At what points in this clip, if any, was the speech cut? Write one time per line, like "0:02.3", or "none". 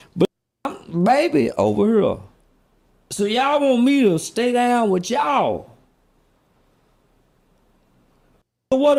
none